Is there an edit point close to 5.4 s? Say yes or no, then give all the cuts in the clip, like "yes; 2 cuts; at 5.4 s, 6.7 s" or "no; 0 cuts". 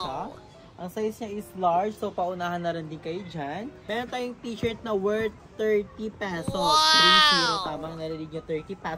no; 1 cut; at 3.7 s